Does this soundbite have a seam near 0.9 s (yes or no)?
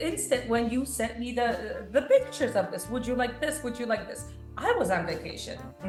no